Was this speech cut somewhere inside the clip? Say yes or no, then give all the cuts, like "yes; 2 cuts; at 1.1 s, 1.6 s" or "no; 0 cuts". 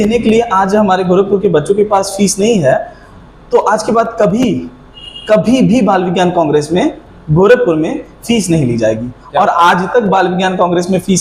no; 0 cuts